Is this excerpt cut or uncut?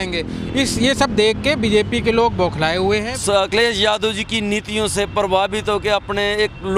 cut